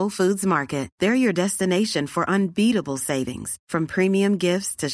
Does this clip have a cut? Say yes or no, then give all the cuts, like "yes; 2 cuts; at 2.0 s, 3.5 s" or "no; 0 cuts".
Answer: no; 0 cuts